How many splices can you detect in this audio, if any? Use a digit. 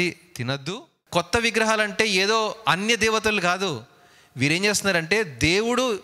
1